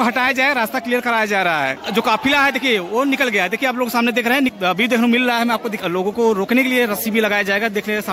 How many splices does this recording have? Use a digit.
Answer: 3